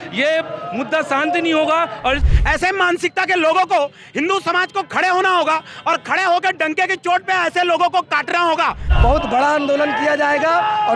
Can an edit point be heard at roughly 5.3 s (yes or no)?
no